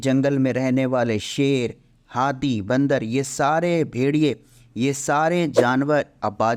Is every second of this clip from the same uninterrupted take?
yes; 0 cuts

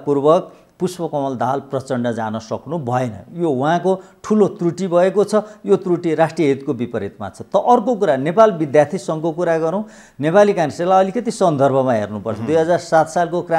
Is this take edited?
no; 0 cuts

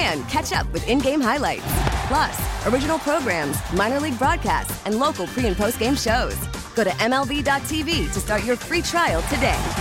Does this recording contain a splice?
no; 0 cuts

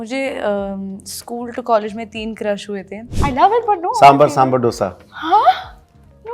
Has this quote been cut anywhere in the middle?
yes; 1 cut; at 3.1 s

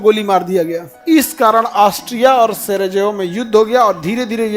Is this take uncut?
no; 1 cut; at 0.9 s

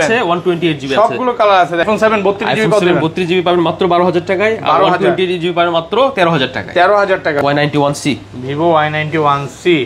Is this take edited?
yes; 2 cuts; at 1.8 s, 7.4 s

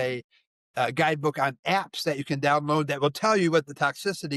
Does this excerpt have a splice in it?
no; 0 cuts

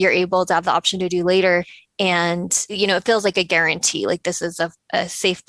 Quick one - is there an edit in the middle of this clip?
yes; 2 cuts; at 1.8 s, 2.8 s

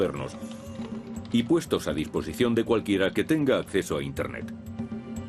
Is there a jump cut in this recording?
no; 0 cuts

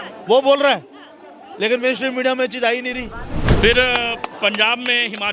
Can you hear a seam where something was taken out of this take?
yes; 1 cut; at 3.5 s

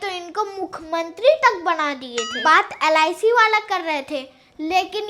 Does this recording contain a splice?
yes; 1 cut; at 2.4 s

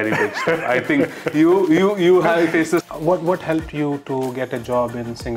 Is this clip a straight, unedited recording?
no; 1 cut; at 2.8 s

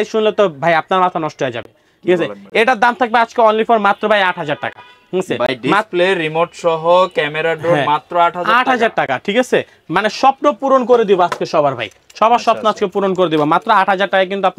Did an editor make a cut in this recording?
no; 0 cuts

